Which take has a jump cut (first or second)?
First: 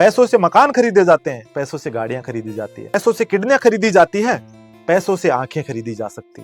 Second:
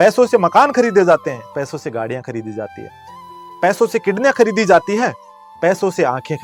first